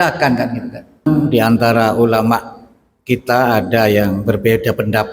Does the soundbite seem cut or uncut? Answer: cut